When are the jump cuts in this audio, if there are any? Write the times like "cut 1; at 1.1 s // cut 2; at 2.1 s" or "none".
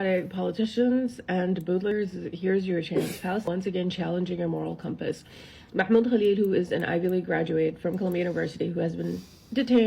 cut 1; at 1.9 s // cut 2; at 3.4 s